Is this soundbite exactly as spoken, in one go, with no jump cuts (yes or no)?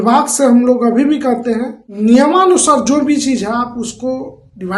no